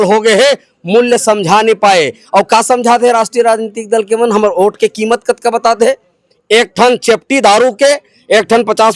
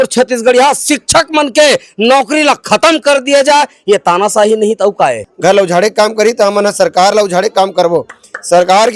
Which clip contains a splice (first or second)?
second